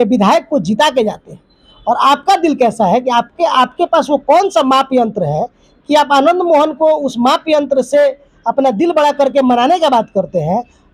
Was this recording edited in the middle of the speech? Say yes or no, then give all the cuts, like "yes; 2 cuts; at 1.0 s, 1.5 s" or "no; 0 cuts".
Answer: no; 0 cuts